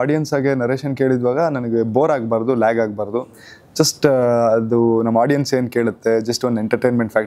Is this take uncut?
yes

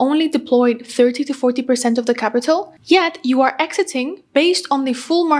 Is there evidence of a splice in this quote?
no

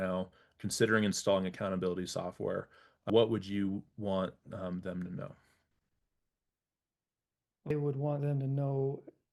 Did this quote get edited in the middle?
yes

